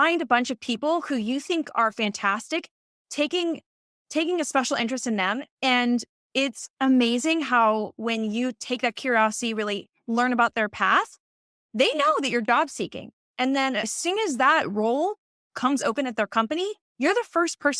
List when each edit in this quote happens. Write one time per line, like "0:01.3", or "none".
0:13.9